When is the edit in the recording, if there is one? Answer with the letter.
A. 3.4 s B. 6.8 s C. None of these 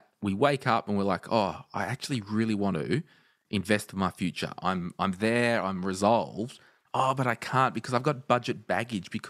C